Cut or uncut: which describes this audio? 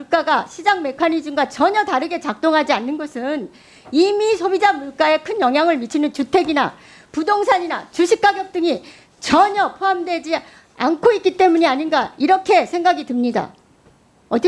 uncut